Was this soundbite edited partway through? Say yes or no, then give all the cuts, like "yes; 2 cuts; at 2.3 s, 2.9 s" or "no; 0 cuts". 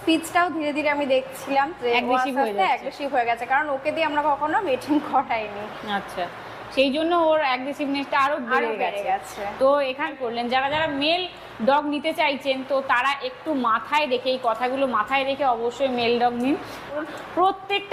no; 0 cuts